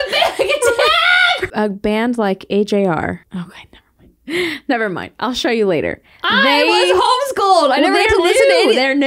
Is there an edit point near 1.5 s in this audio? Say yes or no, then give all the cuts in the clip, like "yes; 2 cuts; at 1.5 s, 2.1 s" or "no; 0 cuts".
yes; 2 cuts; at 1.5 s, 3.2 s